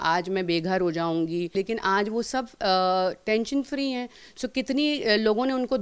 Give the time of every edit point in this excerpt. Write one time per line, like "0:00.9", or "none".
0:01.5